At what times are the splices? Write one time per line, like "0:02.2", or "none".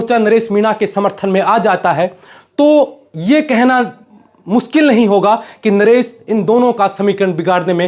none